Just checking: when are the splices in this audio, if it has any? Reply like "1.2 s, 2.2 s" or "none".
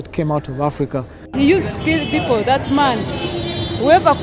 1.2 s